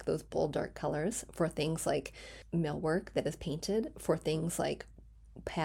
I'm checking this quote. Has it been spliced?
no; 0 cuts

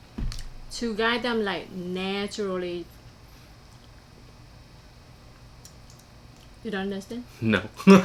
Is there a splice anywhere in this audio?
no; 0 cuts

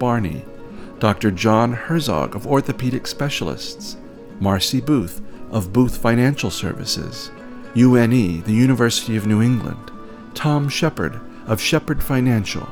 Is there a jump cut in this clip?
no; 0 cuts

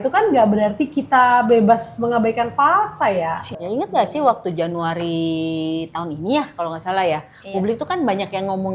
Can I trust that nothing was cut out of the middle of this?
no; 1 cut; at 3.5 s

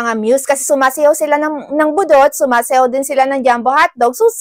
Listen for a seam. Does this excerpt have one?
no; 0 cuts

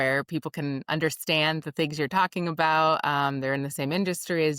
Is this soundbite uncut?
yes; 0 cuts

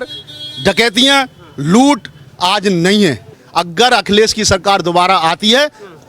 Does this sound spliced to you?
yes; 1 cut; at 3.3 s

